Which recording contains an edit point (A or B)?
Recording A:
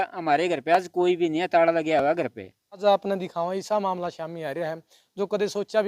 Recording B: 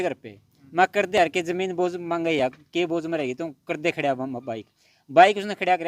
A